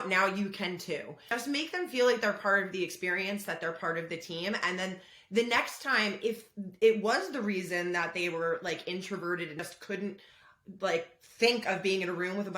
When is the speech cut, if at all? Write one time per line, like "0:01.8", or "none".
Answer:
0:01.4
0:09.6